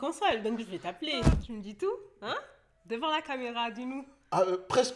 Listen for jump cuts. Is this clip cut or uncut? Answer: cut